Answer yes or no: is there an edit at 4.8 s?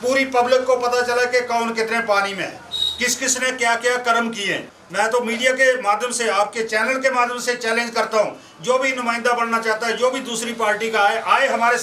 yes